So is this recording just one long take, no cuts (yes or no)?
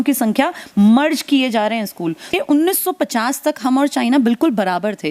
no